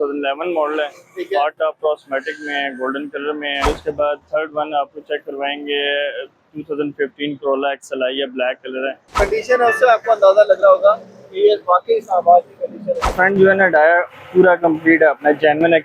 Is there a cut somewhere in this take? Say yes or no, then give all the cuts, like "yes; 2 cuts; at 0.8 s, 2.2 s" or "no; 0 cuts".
yes; 3 cuts; at 3.6 s, 9.2 s, 13.1 s